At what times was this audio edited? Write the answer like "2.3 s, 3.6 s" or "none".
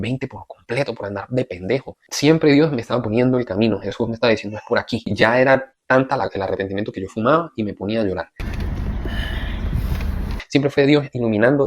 2.1 s, 5.1 s, 8.4 s, 10.4 s